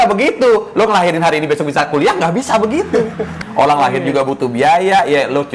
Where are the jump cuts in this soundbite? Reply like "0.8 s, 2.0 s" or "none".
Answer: 3.3 s